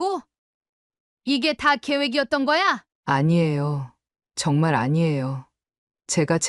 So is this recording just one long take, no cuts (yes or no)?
no